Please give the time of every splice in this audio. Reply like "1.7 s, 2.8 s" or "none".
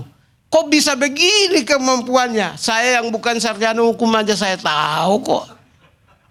none

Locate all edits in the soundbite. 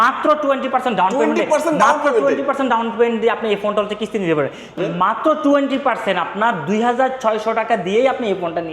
4.8 s

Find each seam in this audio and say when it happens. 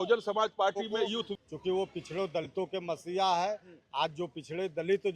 1.4 s

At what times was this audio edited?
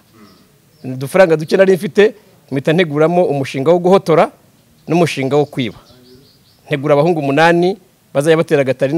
none

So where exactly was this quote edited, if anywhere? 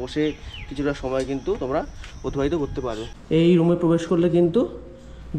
3.1 s

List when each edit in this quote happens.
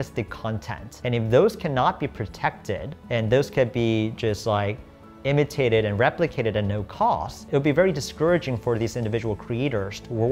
none

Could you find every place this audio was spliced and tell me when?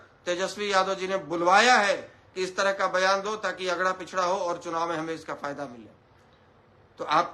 none

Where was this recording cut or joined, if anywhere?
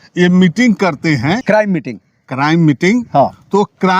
1.4 s

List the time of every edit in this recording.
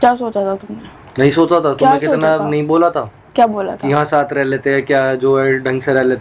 none

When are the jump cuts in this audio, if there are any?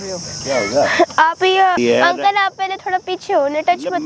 1.8 s

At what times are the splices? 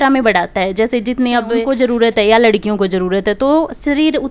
1.6 s

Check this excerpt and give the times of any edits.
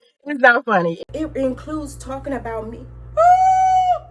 1.0 s

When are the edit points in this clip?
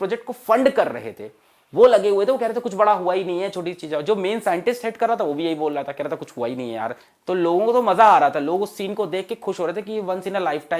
7.1 s

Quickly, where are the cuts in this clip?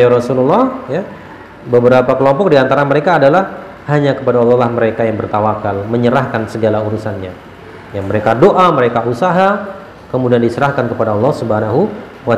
none

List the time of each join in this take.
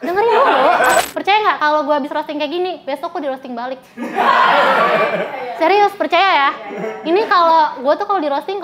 1.0 s

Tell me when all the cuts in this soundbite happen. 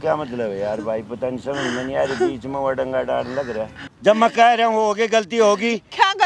3.8 s

